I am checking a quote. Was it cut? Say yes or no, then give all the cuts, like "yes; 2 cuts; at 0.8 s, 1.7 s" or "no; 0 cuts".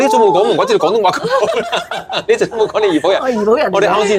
no; 0 cuts